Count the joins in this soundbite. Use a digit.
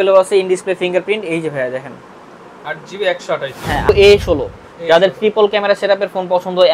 1